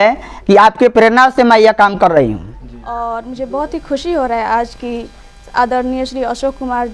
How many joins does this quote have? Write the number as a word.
one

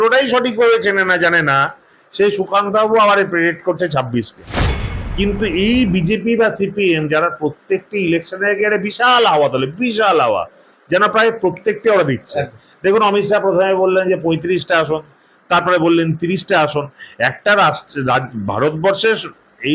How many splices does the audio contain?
one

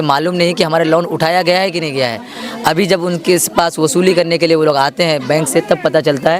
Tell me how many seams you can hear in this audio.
zero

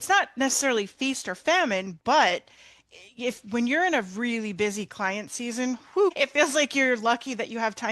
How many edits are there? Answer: one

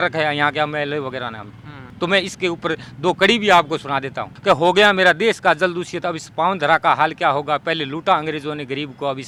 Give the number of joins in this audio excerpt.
zero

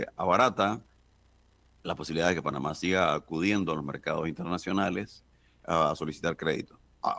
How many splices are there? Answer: zero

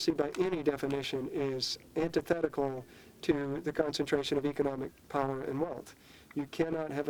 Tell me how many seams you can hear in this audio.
zero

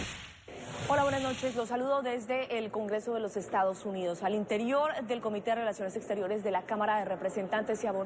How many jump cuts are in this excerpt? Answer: one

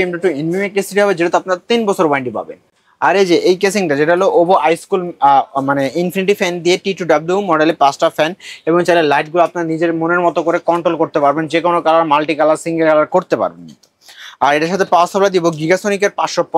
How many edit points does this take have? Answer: zero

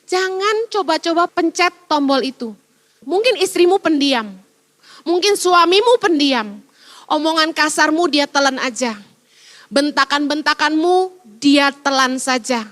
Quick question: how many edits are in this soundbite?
two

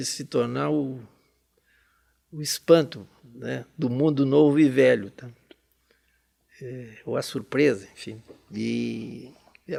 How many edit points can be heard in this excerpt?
zero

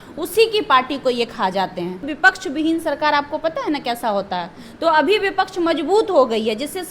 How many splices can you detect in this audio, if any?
one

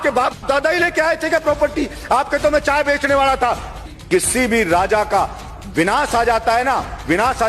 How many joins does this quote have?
one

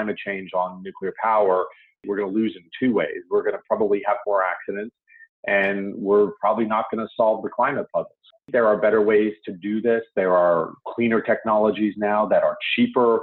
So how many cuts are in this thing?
one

